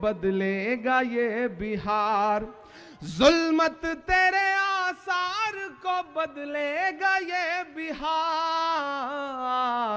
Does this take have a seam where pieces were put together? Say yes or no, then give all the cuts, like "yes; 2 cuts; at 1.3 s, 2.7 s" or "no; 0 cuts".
no; 0 cuts